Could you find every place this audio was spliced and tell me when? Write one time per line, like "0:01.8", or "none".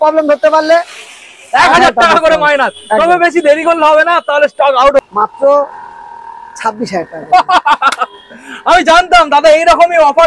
0:05.0